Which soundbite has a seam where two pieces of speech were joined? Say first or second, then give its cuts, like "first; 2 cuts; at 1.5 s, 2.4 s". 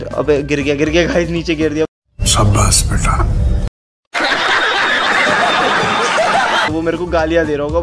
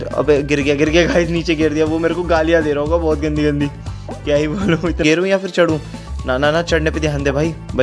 second; 2 cuts; at 1.9 s, 5.0 s